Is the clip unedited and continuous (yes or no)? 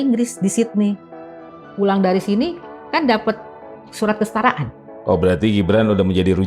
no